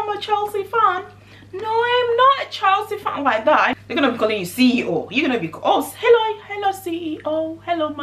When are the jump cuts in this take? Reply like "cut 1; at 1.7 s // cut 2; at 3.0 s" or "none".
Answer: cut 1; at 3.7 s